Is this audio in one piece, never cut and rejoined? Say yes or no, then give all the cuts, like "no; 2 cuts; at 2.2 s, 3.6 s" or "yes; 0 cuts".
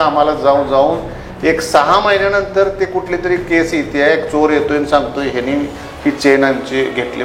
yes; 0 cuts